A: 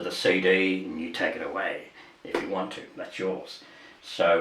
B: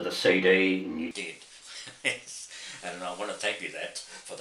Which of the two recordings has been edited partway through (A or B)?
B